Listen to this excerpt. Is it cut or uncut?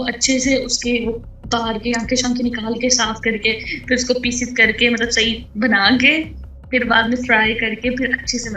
uncut